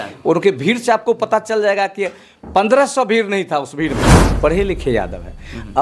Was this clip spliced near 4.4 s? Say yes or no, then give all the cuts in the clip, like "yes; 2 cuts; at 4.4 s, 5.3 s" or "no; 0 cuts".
yes; 1 cut; at 4.4 s